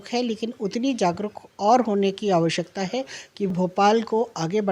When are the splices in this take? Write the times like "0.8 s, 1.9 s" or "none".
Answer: 3.5 s